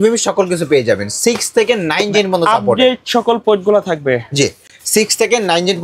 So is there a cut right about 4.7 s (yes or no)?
no